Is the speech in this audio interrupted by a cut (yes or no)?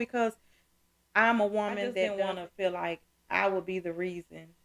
yes